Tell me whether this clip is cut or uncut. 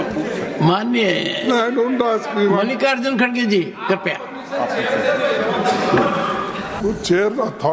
cut